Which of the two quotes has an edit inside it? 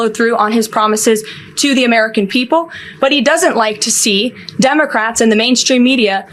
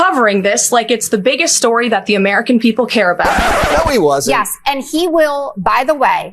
second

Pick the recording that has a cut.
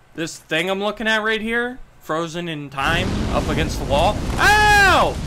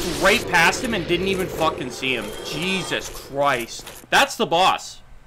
second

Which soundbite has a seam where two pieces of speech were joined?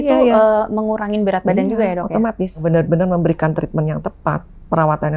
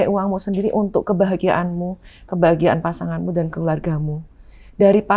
first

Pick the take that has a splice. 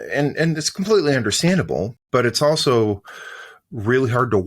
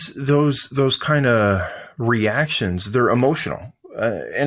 first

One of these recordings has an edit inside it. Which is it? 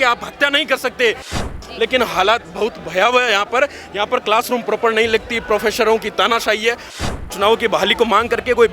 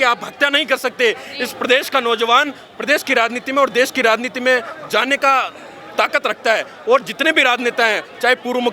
first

